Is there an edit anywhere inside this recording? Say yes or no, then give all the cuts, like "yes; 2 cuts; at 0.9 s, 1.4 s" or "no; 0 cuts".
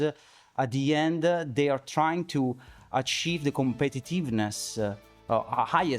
no; 0 cuts